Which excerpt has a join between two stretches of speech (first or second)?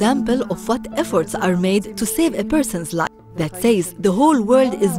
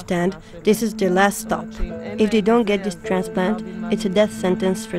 first